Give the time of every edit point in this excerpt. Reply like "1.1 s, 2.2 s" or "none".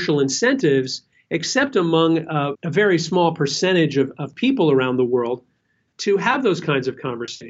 2.5 s